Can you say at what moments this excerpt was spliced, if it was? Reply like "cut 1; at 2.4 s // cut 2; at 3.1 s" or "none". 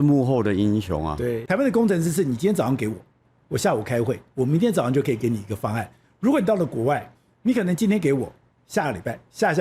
cut 1; at 1.4 s